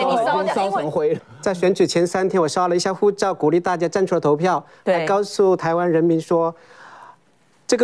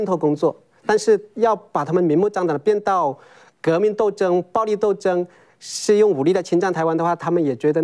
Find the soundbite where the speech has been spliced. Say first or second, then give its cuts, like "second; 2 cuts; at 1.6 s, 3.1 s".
first; 1 cut; at 1.3 s